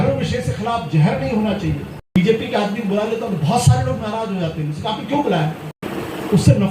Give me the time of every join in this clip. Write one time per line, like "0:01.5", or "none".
0:02.2
0:05.8